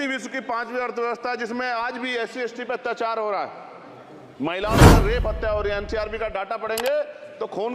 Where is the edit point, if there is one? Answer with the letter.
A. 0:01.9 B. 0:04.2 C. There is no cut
C